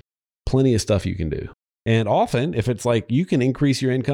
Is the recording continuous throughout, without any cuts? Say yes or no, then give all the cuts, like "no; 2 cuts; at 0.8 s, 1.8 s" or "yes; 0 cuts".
no; 1 cut; at 1.5 s